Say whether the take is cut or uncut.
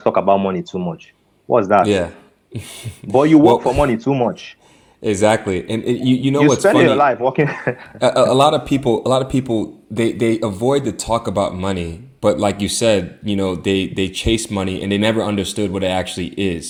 uncut